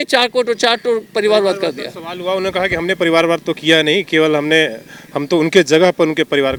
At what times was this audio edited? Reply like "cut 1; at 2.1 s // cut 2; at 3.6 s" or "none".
none